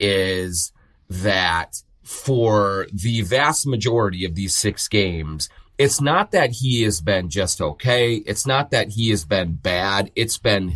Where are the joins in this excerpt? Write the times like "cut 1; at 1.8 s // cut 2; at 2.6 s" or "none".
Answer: none